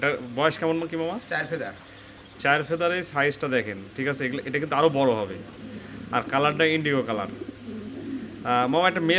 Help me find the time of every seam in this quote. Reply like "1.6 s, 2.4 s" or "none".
none